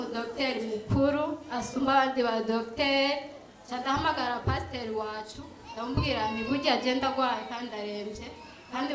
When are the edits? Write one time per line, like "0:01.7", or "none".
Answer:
none